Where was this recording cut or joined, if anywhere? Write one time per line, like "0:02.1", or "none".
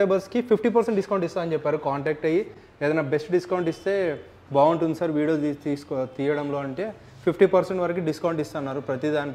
none